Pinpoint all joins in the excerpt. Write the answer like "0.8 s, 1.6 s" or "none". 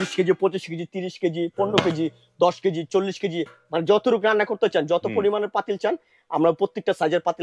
none